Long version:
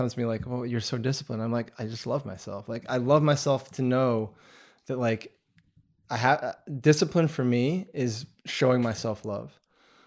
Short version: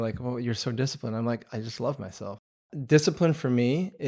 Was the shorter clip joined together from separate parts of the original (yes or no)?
yes